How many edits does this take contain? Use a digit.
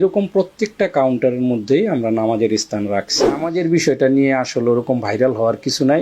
1